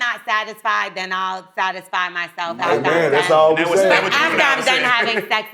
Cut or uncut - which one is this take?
uncut